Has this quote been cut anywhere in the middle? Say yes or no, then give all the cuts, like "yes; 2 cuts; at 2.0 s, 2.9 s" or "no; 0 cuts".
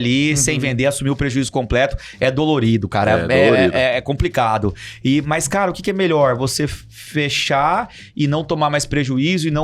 no; 0 cuts